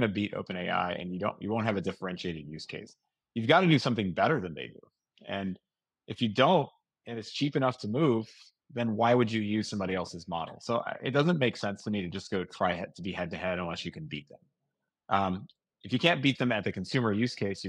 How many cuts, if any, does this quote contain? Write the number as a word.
zero